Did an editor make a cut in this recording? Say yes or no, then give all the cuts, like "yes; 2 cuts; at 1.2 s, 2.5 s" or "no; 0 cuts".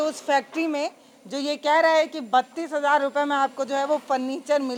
no; 0 cuts